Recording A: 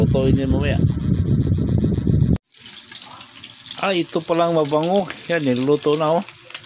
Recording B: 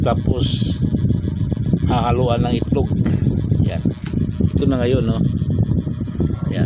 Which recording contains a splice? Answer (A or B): A